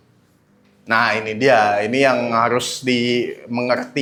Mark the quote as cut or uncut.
uncut